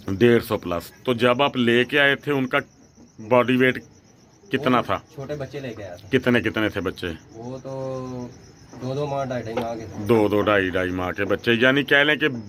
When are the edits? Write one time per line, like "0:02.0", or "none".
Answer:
none